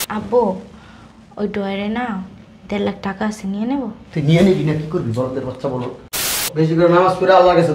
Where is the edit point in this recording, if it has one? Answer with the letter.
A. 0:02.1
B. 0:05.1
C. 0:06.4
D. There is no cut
C